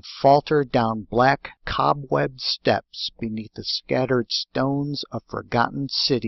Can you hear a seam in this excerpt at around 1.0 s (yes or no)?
no